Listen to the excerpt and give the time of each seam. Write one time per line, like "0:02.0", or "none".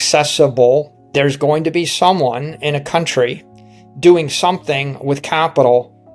0:01.0